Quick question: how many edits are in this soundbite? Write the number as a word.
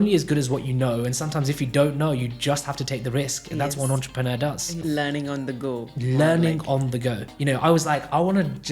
two